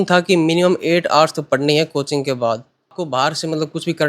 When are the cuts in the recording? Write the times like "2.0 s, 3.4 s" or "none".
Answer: 3.0 s